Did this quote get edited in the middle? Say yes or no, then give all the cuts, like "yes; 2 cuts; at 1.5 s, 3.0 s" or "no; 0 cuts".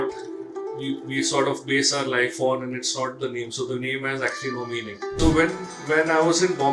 yes; 1 cut; at 5.1 s